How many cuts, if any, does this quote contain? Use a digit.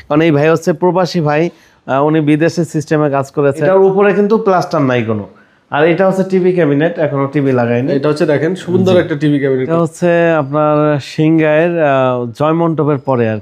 2